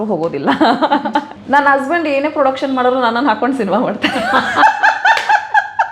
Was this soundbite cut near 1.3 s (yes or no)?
yes